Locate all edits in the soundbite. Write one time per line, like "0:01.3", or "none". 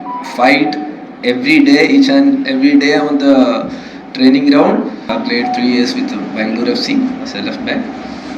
0:05.1